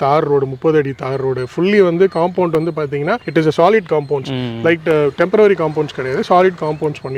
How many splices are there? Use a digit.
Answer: 0